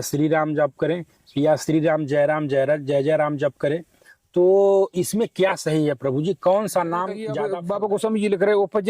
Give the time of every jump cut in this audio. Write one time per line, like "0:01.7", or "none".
0:07.4

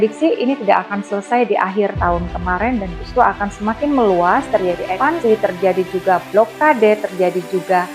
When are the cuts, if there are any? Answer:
0:02.1
0:05.1

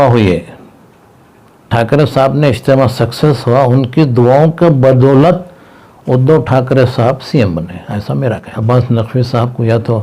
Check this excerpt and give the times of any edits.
0:08.5

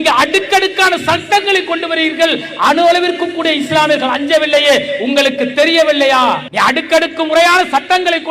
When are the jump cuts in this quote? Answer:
0:06.5

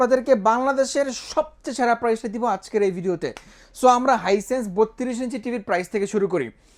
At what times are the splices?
none

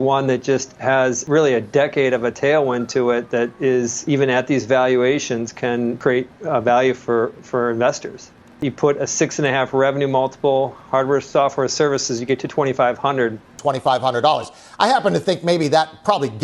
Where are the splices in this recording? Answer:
0:01.2
0:04.0
0:06.0
0:08.6
0:13.5

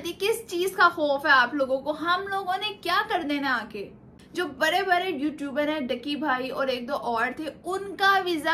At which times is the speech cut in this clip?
none

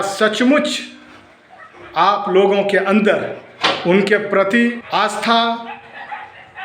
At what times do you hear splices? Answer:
0:04.8

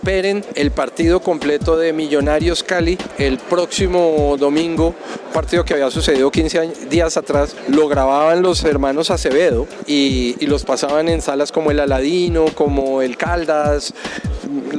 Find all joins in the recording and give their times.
0:03.0

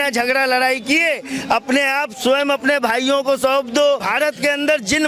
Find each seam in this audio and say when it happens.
0:04.1

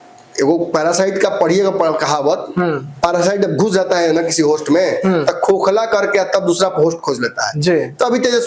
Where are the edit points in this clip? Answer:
none

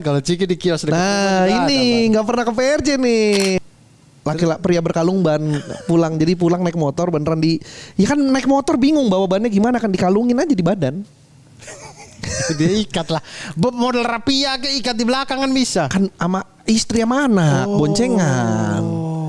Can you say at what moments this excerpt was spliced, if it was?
0:03.6

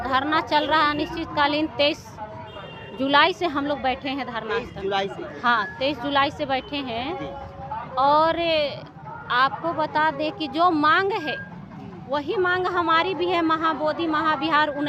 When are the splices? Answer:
none

